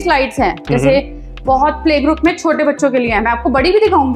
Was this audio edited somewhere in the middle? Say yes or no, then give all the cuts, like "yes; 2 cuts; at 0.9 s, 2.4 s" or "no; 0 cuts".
no; 0 cuts